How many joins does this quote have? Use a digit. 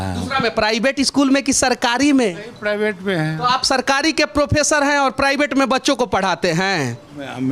0